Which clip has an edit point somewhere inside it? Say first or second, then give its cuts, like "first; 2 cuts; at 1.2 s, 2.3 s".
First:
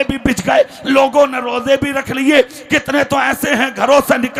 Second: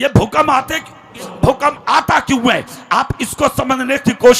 second; 1 cut; at 1.2 s